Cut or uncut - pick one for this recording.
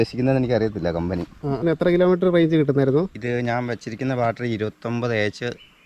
cut